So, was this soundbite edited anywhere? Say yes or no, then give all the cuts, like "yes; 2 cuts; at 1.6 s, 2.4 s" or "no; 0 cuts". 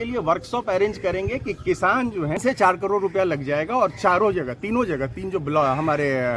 yes; 1 cut; at 2.4 s